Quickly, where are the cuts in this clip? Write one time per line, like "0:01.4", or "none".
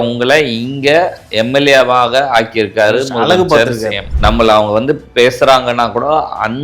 0:04.1